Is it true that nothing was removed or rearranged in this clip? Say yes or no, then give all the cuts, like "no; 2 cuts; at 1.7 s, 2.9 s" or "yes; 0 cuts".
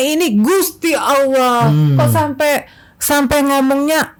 yes; 0 cuts